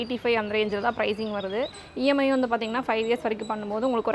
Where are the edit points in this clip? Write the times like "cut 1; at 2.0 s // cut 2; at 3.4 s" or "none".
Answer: cut 1; at 1.7 s